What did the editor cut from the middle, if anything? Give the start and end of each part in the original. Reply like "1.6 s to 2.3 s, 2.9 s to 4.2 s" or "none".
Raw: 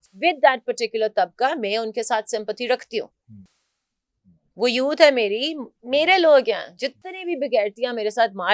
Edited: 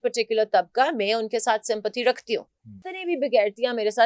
3.5 s to 7.1 s